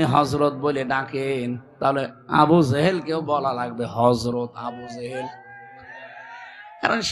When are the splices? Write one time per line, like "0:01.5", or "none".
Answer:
none